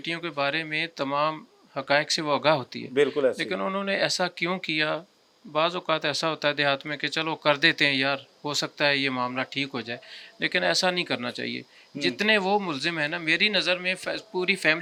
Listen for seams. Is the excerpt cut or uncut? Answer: uncut